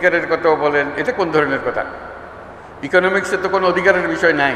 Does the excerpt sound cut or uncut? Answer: uncut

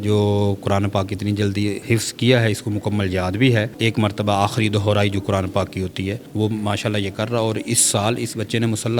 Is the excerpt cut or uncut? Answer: cut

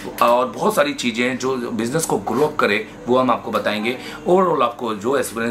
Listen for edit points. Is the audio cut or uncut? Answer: uncut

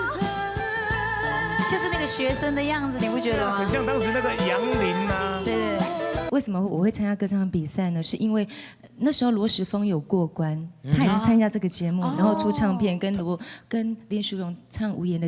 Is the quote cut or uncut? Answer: cut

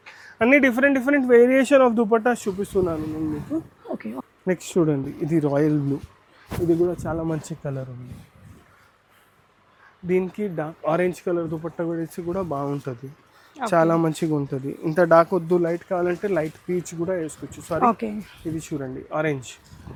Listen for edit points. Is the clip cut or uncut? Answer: uncut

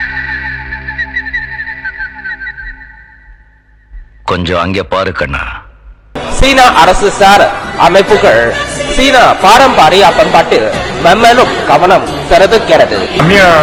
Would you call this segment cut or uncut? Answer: uncut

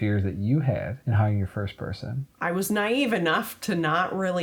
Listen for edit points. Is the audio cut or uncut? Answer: cut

